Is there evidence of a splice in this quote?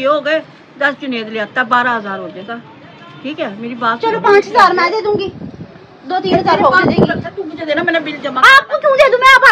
no; 0 cuts

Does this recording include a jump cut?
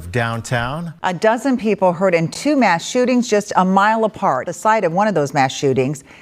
yes; 2 cuts; at 1.0 s, 4.5 s

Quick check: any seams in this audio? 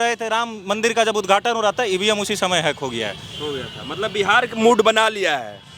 no; 0 cuts

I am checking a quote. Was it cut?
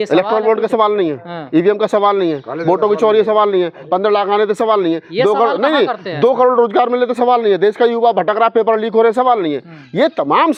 no; 0 cuts

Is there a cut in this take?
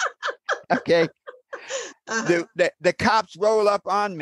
no; 0 cuts

